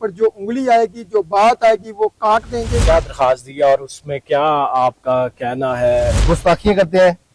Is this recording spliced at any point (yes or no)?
yes